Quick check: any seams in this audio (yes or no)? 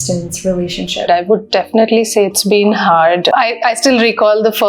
yes